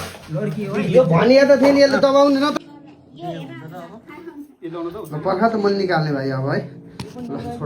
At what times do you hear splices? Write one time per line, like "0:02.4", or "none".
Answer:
0:02.5